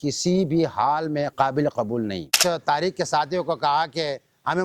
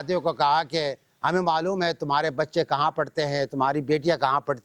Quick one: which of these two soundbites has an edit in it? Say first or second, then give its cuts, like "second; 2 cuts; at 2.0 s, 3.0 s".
first; 2 cuts; at 1.3 s, 2.3 s